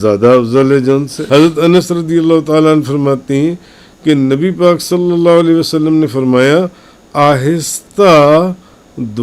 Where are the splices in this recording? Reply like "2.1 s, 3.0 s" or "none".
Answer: 1.1 s